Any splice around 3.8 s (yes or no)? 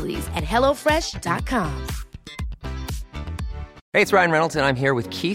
yes